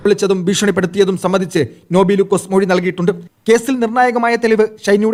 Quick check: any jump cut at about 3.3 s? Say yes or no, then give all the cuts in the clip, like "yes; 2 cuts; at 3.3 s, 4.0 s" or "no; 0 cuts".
no; 0 cuts